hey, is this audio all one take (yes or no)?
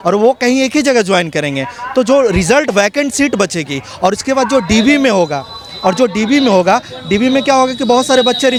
yes